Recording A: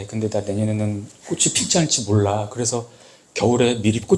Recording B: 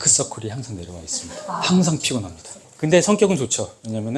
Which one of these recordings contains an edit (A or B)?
B